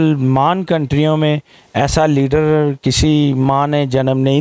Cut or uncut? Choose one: uncut